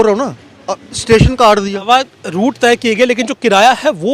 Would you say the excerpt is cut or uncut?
cut